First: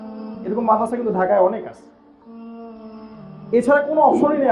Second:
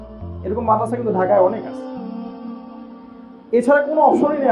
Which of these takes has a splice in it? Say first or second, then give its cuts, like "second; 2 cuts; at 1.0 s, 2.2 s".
second; 2 cuts; at 1.7 s, 3.4 s